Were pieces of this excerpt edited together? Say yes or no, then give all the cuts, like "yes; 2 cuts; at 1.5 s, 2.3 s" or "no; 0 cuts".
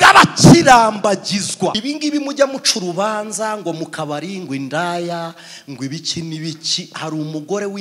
yes; 1 cut; at 1.8 s